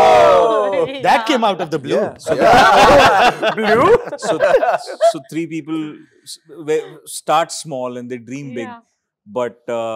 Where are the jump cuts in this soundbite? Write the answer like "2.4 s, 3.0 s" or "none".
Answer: none